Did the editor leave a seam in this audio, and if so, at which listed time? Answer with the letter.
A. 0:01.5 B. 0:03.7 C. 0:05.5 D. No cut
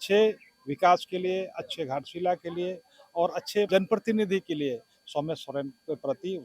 B